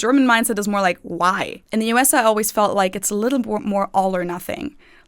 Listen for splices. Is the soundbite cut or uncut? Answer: cut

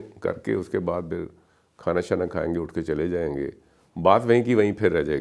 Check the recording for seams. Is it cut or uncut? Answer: uncut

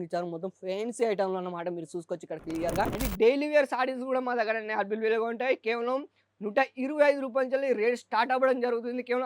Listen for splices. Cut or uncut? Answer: cut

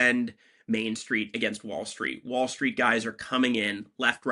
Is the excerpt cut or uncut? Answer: uncut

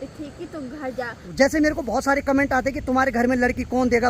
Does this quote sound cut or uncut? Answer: cut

